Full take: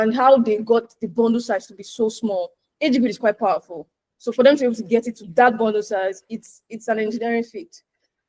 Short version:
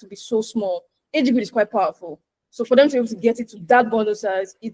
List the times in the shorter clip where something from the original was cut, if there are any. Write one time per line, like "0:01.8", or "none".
none